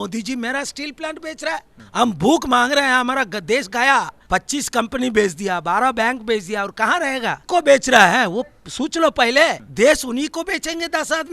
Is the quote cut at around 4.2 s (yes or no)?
yes